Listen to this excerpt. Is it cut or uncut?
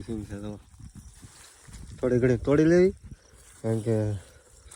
uncut